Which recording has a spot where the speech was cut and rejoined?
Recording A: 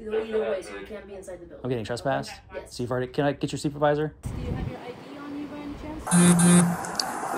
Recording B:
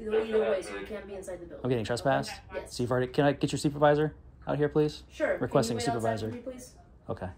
A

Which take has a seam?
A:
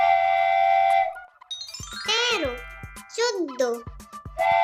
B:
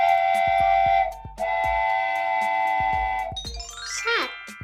B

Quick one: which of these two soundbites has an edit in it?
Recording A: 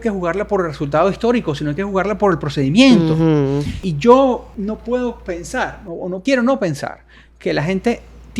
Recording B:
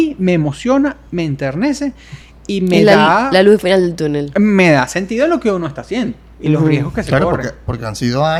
A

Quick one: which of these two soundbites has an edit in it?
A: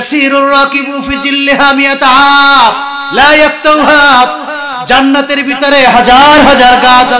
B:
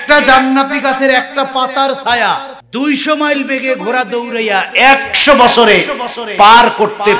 B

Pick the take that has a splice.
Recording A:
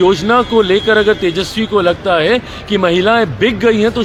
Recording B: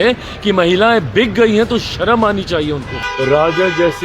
B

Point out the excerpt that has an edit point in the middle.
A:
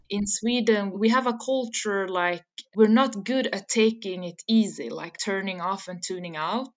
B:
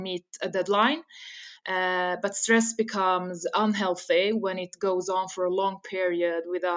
A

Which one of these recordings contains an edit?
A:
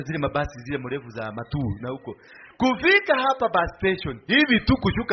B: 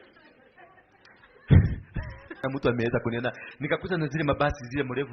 B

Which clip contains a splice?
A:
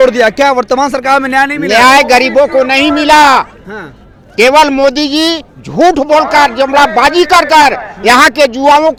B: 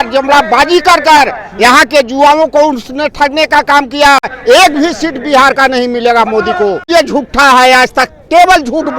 B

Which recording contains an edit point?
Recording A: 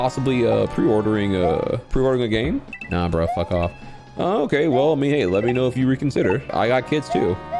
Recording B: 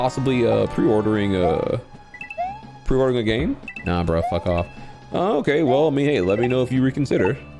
A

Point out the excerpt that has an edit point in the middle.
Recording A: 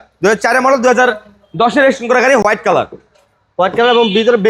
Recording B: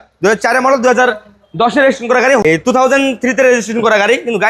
B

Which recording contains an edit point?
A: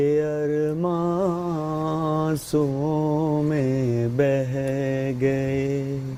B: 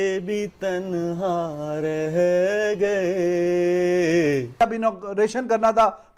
B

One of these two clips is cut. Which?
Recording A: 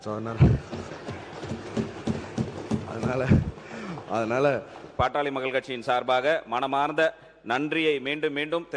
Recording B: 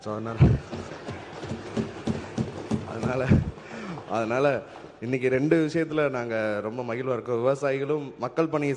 A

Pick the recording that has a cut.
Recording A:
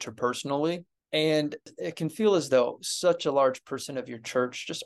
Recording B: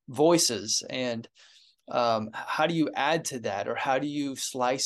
A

